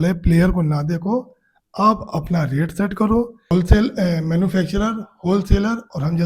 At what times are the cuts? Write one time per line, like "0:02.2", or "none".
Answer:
0:03.5